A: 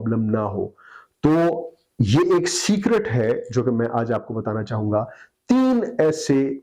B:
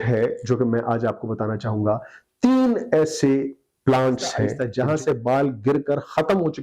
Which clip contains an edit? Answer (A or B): B